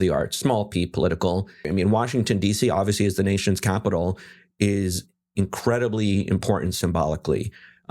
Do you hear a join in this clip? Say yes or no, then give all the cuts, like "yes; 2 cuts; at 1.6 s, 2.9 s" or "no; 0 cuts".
yes; 1 cut; at 1.6 s